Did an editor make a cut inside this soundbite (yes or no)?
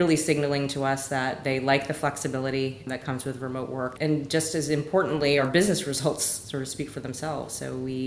yes